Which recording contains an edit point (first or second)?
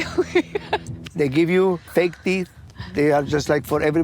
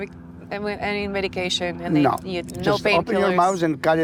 first